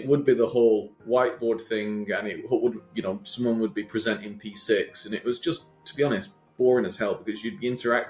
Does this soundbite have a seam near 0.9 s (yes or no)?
yes